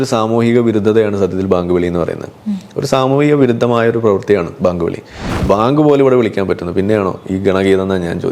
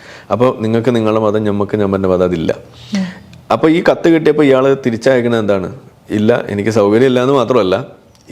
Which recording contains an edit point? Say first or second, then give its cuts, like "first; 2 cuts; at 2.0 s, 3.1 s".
first; 1 cut; at 5.3 s